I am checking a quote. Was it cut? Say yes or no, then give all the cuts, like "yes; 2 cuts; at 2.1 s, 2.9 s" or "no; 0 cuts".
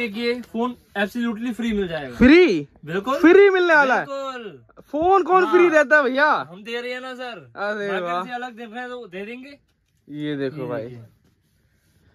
no; 0 cuts